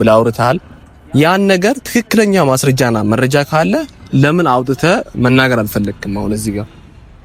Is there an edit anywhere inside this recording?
no; 0 cuts

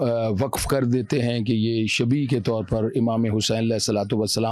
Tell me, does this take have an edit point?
no; 0 cuts

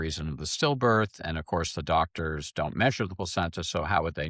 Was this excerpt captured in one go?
yes; 0 cuts

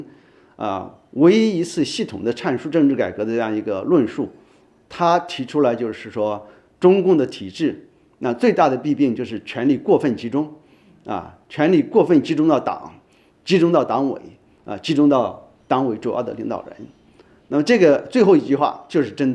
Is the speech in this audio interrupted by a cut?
no; 0 cuts

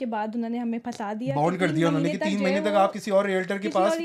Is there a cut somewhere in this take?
no; 0 cuts

